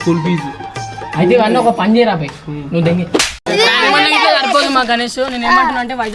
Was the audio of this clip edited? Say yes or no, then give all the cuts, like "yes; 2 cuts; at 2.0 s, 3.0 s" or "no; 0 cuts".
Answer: yes; 1 cut; at 3.4 s